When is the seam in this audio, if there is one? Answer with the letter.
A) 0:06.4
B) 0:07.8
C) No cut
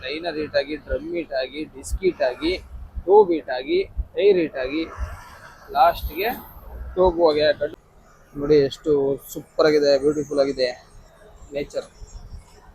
B